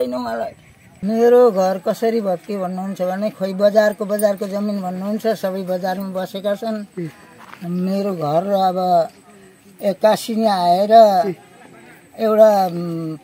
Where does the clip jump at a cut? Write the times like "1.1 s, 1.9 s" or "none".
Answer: 1.0 s

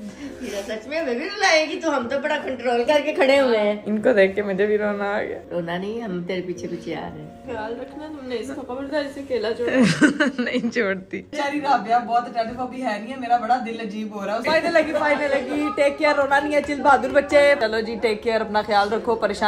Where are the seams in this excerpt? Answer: 3.8 s, 7.4 s, 11.3 s, 14.4 s, 17.6 s

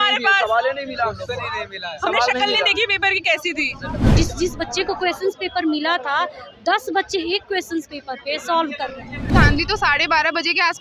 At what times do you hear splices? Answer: 4.1 s, 9.3 s

